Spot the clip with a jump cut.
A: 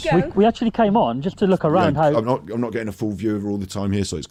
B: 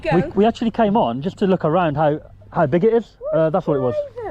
B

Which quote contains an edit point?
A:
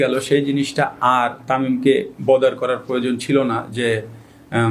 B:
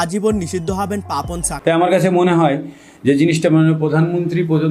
B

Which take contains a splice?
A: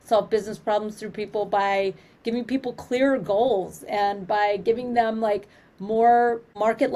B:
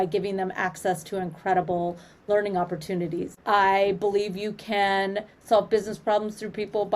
B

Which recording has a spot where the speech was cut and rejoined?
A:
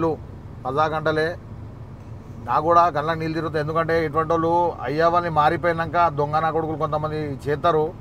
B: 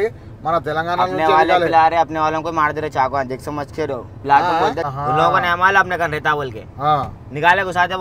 B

